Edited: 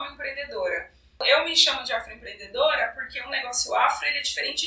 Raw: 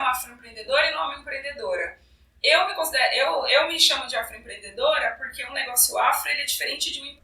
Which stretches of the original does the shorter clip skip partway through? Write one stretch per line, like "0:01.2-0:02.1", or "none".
0:02.3-0:03.5